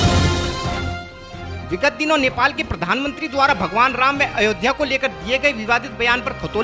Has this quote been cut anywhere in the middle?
yes; 1 cut; at 1.1 s

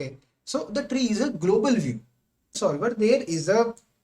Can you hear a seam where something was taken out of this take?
yes; 1 cut; at 2.6 s

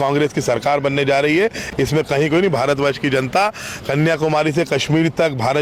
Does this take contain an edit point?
no; 0 cuts

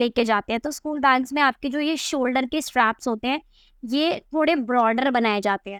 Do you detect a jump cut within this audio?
no; 0 cuts

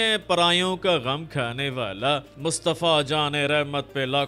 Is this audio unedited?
no; 1 cut; at 2.3 s

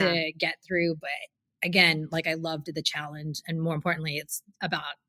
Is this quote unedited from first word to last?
yes; 0 cuts

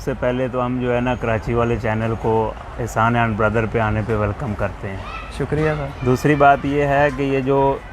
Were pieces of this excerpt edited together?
no; 0 cuts

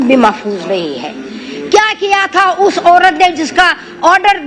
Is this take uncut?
yes; 0 cuts

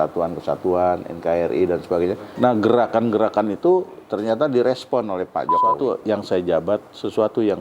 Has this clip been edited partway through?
yes; 2 cuts; at 2.2 s, 5.8 s

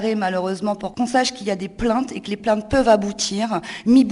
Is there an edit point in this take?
yes; 2 cuts; at 0.9 s, 2.4 s

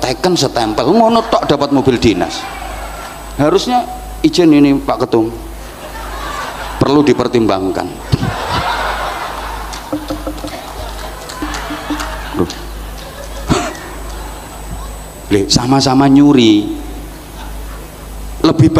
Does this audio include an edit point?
yes; 1 cut; at 11.4 s

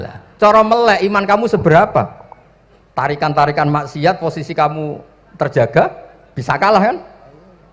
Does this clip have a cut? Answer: no; 0 cuts

